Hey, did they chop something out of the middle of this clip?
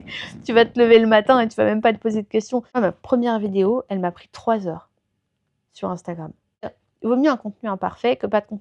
yes; 2 cuts; at 2.8 s, 6.8 s

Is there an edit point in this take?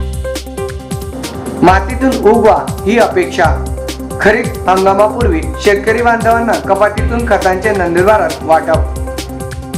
yes; 1 cut; at 1.0 s

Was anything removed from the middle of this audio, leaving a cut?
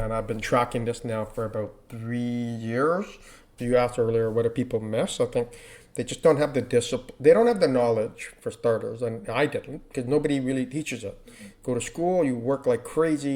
yes; 1 cut; at 3.4 s

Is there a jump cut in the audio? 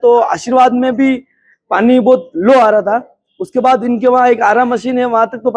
no; 0 cuts

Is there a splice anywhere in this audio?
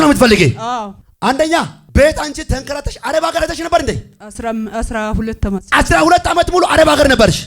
yes; 2 cuts; at 1.0 s, 1.8 s

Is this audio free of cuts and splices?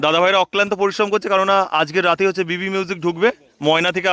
yes; 0 cuts

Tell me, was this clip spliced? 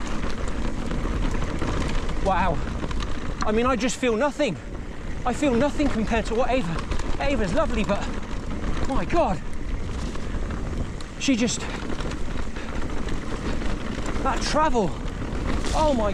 no; 0 cuts

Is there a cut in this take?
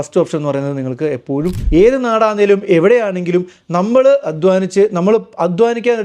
yes; 1 cut; at 1.6 s

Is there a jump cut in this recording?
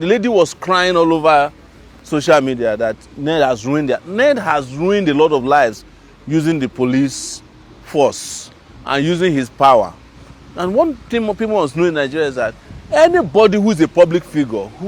no; 0 cuts

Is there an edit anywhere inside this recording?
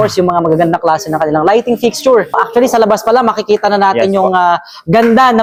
no; 0 cuts

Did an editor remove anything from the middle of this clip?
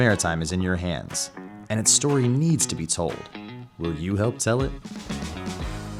no; 0 cuts

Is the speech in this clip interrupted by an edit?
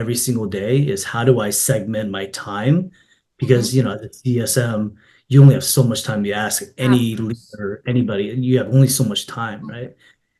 no; 0 cuts

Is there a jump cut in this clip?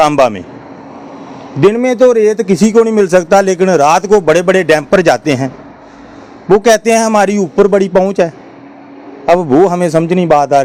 no; 0 cuts

